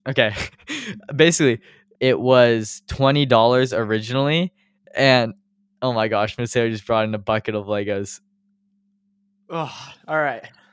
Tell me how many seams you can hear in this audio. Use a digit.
1